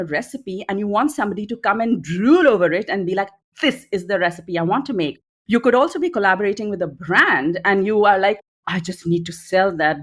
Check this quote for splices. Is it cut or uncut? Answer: uncut